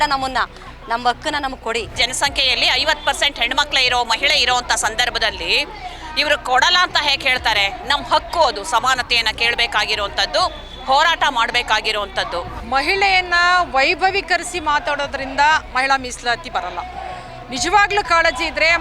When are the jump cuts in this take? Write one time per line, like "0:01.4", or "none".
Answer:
0:02.0
0:12.6